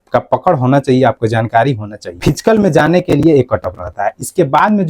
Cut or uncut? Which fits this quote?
cut